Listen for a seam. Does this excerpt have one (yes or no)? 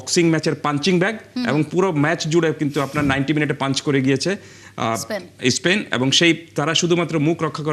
no